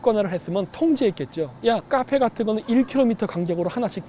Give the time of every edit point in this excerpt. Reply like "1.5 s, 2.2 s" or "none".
1.8 s